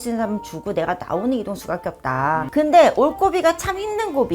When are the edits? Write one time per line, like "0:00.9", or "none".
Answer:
0:02.5